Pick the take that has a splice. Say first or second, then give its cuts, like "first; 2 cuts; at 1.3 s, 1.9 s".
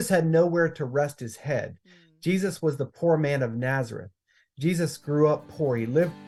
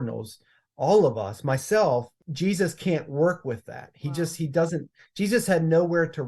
second; 1 cut; at 2.2 s